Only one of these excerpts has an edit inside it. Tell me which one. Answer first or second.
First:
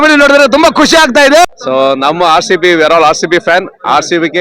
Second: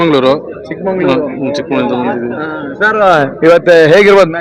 first